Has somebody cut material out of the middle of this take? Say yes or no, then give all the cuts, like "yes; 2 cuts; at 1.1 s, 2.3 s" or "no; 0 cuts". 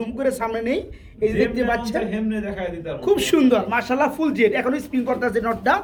no; 0 cuts